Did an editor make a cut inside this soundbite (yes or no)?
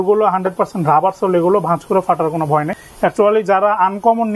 yes